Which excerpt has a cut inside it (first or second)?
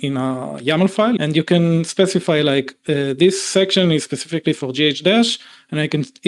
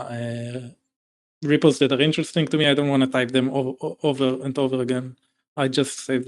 first